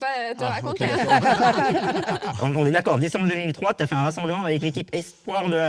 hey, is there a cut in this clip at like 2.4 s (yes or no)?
yes